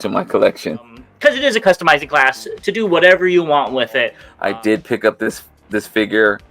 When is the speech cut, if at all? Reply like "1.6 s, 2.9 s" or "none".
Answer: 1.0 s, 4.2 s